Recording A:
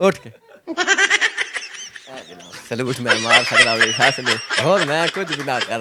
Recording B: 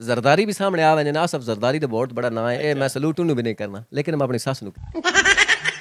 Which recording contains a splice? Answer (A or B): B